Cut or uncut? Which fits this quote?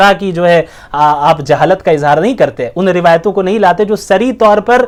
uncut